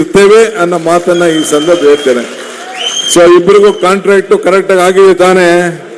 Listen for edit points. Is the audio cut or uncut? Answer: uncut